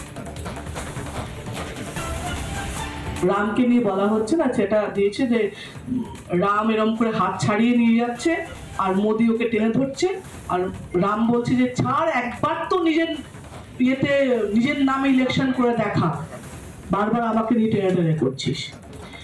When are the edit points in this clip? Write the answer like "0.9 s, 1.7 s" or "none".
0.8 s, 3.2 s